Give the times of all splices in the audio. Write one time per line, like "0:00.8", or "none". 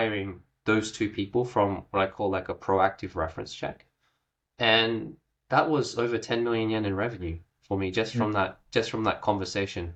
none